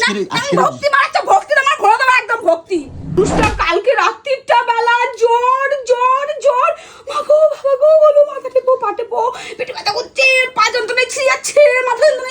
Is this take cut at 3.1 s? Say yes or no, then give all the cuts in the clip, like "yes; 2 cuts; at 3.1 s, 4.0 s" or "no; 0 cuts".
yes; 1 cut; at 3.1 s